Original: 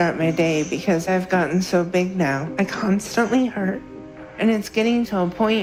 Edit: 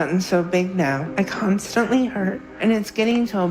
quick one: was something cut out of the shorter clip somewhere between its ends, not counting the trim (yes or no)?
yes